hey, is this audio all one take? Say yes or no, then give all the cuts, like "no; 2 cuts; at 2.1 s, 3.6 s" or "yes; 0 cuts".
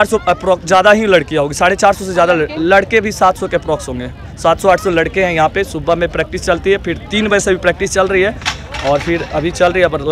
yes; 0 cuts